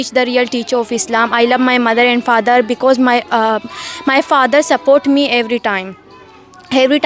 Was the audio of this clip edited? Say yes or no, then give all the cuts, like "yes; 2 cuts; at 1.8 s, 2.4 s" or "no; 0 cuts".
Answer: no; 0 cuts